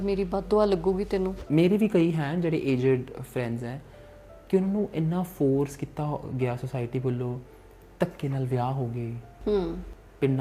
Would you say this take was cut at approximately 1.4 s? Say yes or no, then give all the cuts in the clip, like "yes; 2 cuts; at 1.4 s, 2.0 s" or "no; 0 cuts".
yes; 1 cut; at 1.4 s